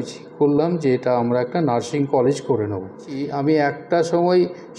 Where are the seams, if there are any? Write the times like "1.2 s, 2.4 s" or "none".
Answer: 3.3 s